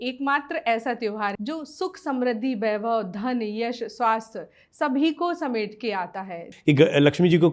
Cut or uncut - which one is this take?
cut